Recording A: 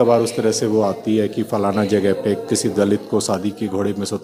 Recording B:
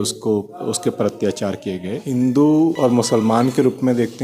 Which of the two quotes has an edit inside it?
B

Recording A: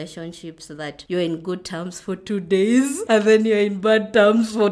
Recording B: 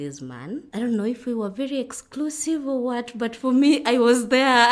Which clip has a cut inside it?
A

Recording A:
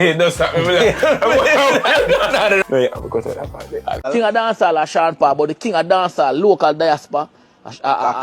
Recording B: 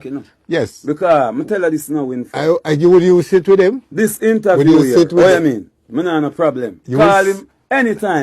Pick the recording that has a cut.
A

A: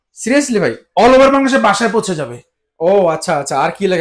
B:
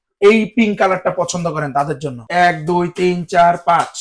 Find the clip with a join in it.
B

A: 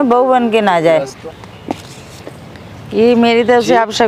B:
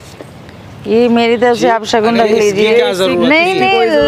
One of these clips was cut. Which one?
A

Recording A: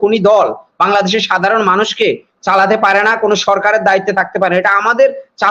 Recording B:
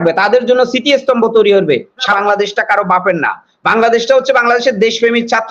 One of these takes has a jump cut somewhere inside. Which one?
B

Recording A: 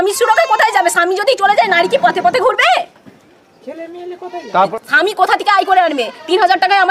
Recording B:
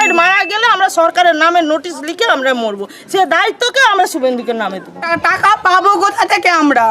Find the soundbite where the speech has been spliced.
B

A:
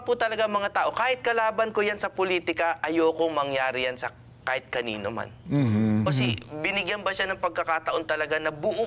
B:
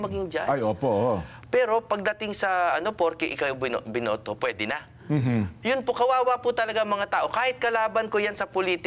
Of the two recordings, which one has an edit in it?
A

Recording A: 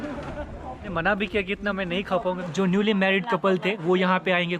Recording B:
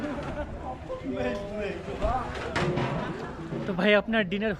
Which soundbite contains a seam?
A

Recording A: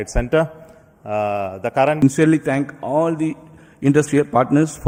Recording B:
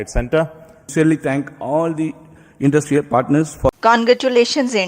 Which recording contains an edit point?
B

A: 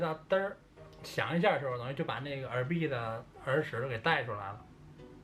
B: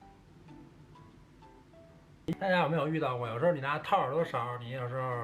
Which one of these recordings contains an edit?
B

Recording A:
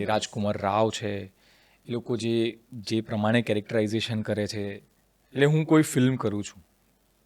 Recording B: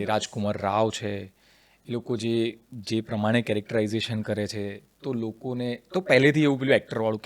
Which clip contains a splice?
A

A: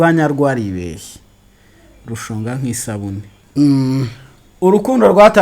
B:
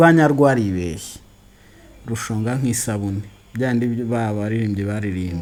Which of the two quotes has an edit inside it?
A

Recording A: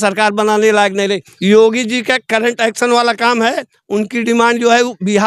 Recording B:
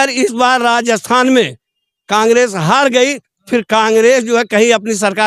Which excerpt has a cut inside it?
A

